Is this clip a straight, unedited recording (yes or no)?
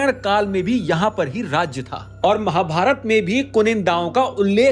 yes